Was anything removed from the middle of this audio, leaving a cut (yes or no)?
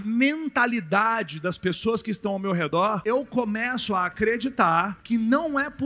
yes